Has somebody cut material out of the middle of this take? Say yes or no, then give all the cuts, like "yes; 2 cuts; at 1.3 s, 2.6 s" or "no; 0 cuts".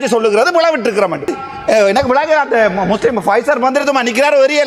yes; 1 cut; at 1.4 s